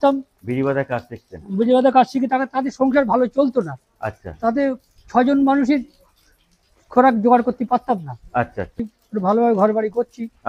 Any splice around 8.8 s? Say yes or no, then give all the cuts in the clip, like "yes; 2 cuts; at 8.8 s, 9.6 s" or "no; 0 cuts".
yes; 1 cut; at 8.8 s